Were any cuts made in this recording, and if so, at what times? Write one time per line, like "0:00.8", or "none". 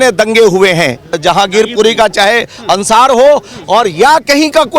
0:01.1